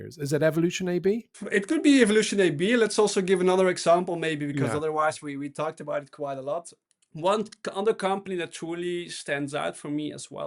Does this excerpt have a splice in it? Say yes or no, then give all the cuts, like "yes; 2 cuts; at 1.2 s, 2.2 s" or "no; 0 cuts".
yes; 2 cuts; at 1.4 s, 6.8 s